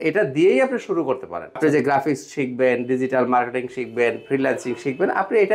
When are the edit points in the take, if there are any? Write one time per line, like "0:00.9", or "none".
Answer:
0:01.6

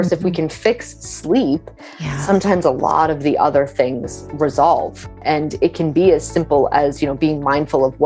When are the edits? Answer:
0:05.1

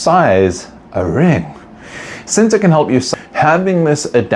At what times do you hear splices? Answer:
0:03.1

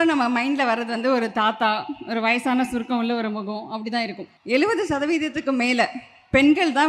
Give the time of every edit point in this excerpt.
0:04.2

